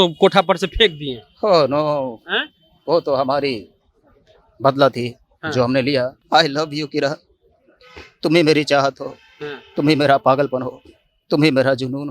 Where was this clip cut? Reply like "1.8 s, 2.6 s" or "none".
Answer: 6.2 s